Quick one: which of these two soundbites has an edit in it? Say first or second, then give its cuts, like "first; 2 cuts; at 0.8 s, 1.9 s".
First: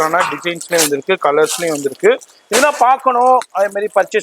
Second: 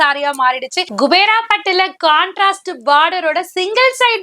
second; 1 cut; at 0.9 s